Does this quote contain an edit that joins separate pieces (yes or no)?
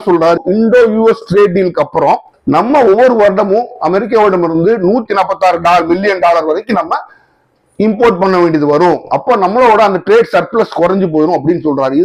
no